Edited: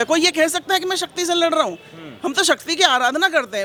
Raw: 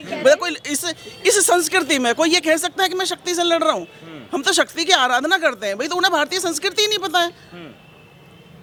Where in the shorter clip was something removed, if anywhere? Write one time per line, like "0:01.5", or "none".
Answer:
none